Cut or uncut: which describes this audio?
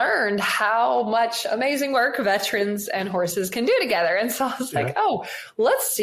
uncut